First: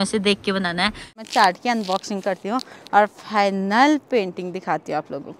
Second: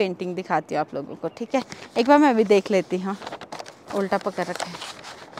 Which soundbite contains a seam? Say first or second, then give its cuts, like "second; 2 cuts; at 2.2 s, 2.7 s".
first; 1 cut; at 1.2 s